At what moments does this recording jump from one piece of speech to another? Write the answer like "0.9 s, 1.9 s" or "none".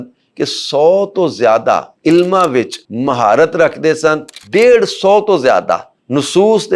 1.9 s, 2.8 s, 4.4 s

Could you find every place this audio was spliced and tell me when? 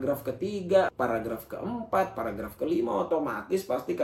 0.9 s

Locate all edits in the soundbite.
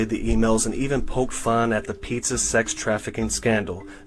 none

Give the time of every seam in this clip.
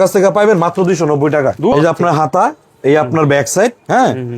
1.7 s

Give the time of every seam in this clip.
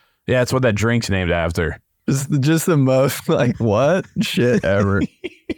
1.9 s

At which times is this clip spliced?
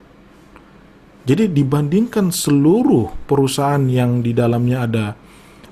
none

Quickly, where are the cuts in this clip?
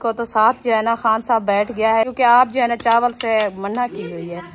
2.1 s

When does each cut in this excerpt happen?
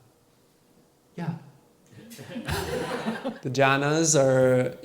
3.2 s

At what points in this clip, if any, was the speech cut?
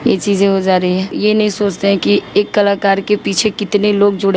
1.1 s

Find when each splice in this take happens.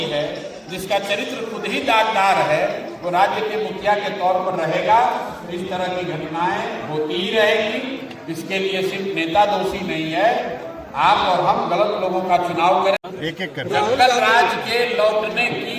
13.0 s

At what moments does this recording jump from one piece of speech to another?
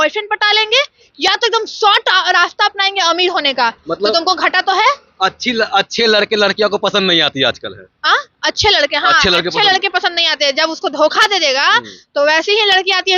none

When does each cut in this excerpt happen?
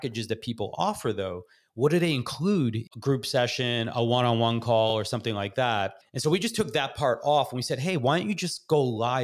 2.8 s, 5.5 s

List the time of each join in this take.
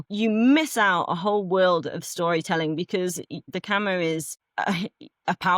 3.5 s, 4.4 s

